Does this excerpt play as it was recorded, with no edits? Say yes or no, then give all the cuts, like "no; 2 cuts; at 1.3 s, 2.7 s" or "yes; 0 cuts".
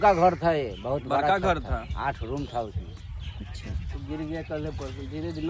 yes; 0 cuts